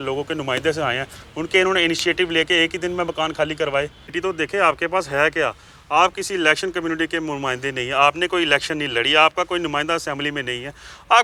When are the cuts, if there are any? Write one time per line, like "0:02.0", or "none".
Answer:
0:04.1